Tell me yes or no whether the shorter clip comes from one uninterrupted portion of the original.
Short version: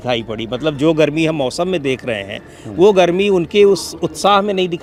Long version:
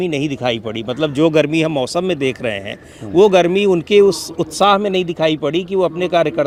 yes